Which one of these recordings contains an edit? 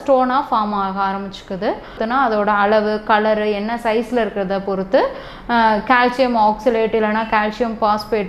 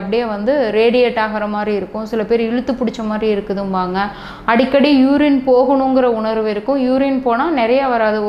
first; 1 cut; at 2.0 s

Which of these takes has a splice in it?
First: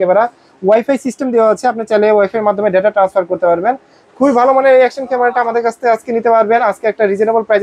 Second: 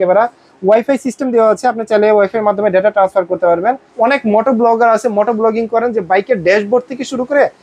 second; 1 cut; at 3.9 s

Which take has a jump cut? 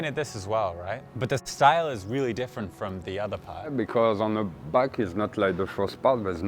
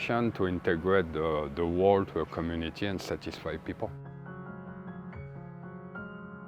first; 2 cuts; at 1.1 s, 3.7 s

